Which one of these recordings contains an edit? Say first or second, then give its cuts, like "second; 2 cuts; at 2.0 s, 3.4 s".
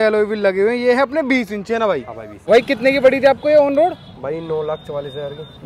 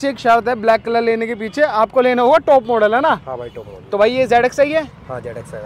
first; 1 cut; at 2.5 s